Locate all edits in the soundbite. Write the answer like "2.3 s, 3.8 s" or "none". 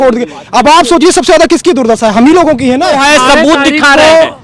3.0 s